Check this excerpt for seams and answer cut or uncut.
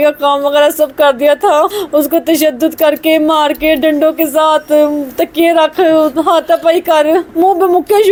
uncut